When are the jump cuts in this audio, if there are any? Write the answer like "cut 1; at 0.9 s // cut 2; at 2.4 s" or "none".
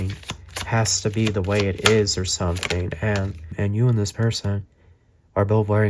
cut 1; at 3.5 s